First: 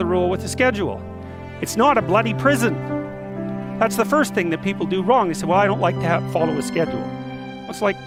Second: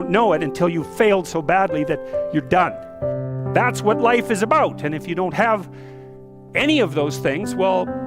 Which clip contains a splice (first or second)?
second